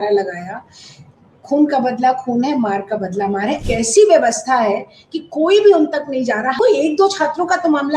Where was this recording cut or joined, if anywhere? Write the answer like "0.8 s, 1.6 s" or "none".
3.6 s, 6.5 s